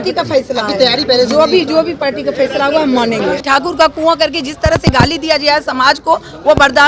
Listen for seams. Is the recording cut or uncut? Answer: cut